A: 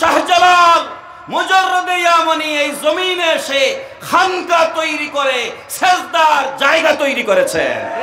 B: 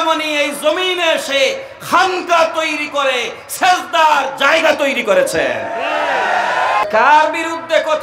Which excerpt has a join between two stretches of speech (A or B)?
B